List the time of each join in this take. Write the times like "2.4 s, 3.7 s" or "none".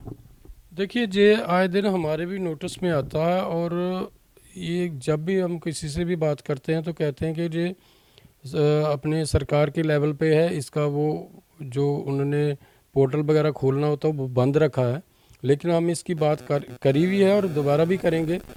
none